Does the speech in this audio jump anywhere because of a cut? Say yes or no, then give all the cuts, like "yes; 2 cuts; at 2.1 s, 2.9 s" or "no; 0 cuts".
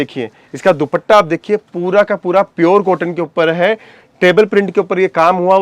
no; 0 cuts